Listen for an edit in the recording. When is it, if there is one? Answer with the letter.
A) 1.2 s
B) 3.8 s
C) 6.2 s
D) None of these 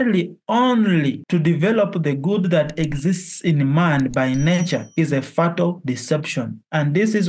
A